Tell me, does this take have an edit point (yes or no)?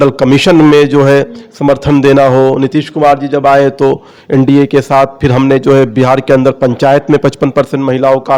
no